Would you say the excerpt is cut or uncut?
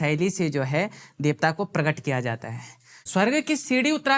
cut